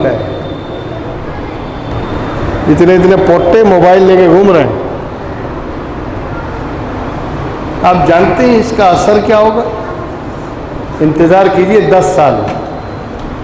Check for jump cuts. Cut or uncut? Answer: cut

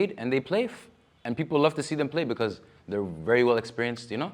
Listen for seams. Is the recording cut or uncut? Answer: uncut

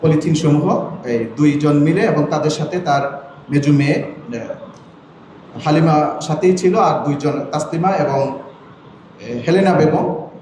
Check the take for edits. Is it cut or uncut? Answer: uncut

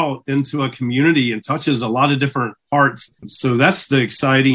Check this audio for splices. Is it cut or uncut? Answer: cut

